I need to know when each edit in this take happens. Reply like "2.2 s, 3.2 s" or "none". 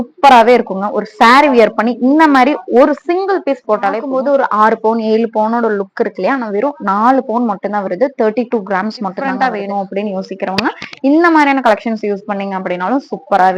4.0 s, 9.2 s